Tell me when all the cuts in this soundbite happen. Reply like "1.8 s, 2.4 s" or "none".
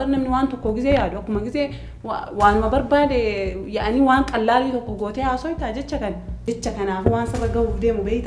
6.4 s